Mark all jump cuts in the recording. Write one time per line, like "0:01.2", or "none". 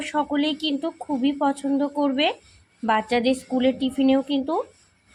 none